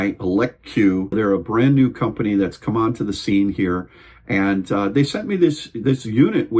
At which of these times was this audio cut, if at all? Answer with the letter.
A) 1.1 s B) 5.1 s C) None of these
A